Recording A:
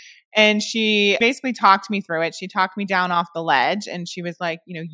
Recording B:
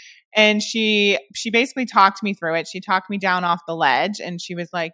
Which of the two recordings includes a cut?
A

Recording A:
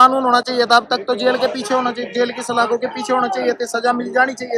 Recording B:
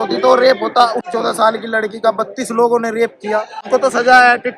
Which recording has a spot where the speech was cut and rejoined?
B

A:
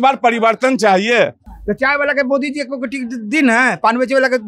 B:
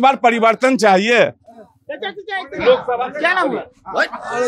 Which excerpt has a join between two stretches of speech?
A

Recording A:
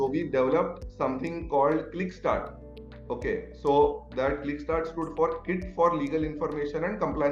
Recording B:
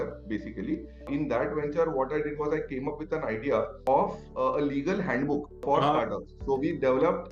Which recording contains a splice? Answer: B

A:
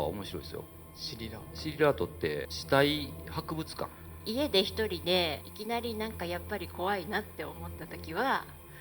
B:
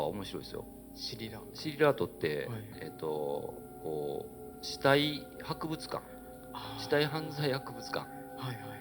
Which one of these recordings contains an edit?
A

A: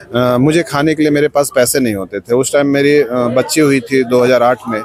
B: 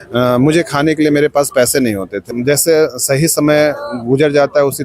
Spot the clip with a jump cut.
B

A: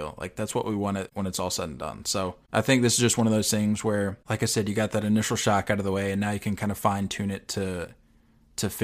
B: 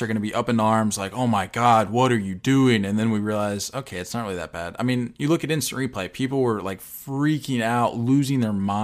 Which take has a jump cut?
A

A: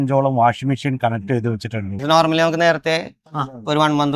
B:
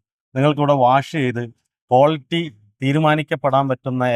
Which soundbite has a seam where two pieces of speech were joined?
A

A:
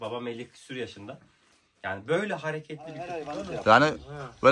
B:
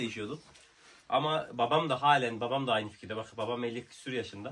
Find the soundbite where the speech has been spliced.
A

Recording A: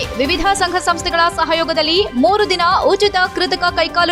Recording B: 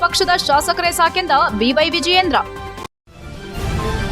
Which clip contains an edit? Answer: B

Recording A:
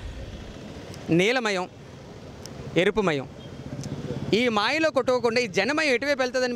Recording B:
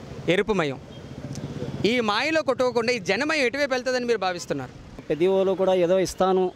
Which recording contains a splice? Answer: B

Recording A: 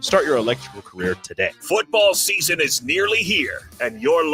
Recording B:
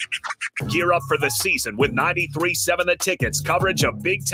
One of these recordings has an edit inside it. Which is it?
A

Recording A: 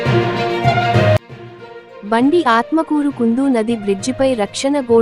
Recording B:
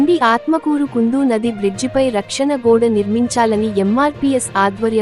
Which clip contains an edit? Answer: A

